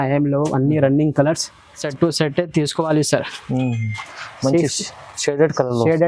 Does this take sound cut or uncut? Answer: cut